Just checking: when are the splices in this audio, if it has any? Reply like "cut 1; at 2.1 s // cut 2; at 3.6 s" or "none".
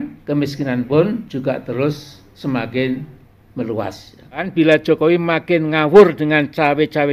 cut 1; at 4.5 s